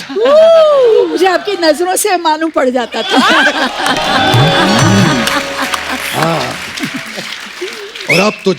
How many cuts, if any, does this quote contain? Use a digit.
0